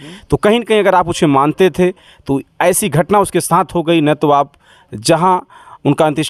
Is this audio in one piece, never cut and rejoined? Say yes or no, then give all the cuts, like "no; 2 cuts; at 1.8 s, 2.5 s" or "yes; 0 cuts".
yes; 0 cuts